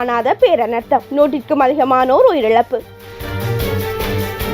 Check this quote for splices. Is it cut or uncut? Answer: cut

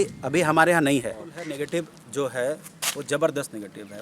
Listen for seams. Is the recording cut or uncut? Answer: cut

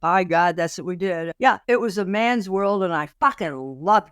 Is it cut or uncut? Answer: cut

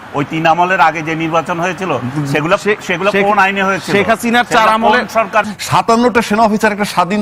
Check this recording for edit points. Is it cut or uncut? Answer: cut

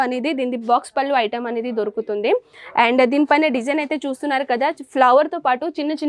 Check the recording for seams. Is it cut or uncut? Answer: uncut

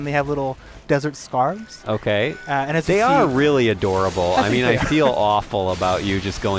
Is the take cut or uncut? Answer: uncut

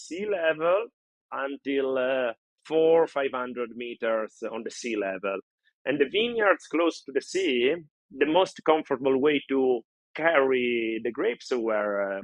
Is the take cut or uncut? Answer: cut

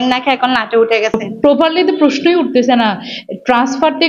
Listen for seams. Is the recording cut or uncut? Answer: cut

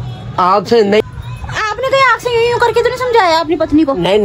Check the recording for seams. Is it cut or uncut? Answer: cut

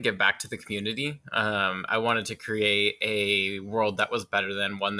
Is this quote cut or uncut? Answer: uncut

